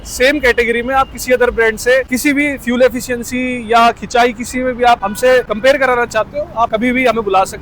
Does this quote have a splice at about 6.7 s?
yes; 3 cuts; at 2.1 s, 5.3 s, 6.7 s

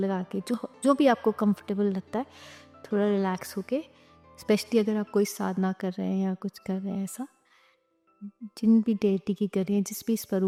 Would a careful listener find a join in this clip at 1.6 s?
no; 0 cuts

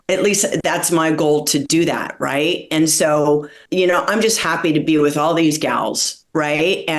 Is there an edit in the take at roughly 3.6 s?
yes; 1 cut; at 3.6 s

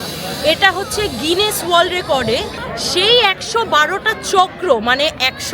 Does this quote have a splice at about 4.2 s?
no; 1 cut; at 2.6 s

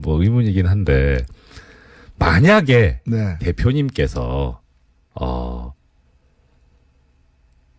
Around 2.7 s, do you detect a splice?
yes; 1 cut; at 2.7 s

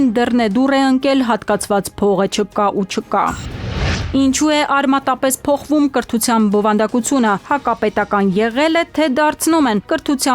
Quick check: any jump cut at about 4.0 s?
yes; 1 cut; at 4.0 s

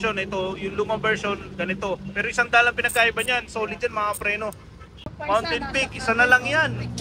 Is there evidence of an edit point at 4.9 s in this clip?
yes; 1 cut; at 4.9 s

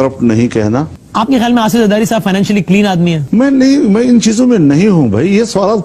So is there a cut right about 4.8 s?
no; 2 cuts; at 1.0 s, 3.2 s

